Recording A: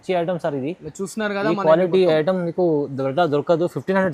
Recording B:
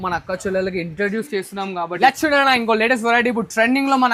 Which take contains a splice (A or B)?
B